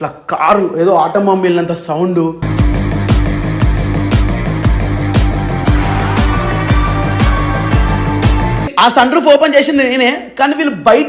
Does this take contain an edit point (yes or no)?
yes